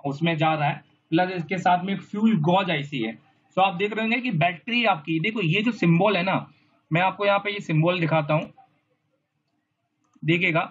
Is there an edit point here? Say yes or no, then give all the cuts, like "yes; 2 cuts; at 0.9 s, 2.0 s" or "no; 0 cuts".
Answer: no; 0 cuts